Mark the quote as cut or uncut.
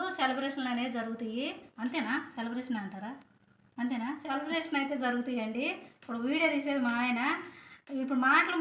uncut